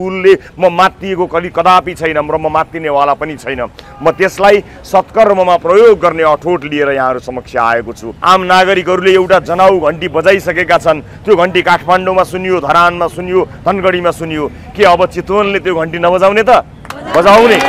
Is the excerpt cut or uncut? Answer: cut